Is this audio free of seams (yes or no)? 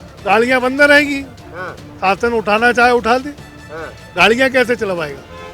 yes